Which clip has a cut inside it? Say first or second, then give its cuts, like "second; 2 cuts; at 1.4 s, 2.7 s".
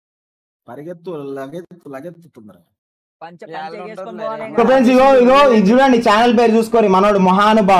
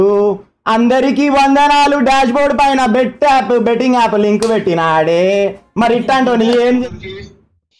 second; 1 cut; at 6.8 s